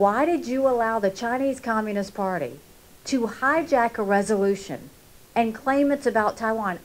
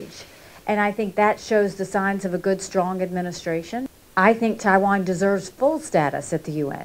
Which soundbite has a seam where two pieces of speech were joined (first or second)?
second